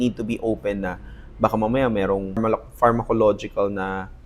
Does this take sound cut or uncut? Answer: cut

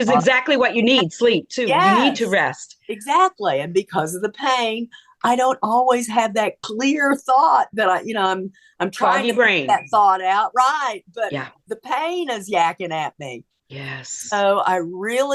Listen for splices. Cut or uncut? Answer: uncut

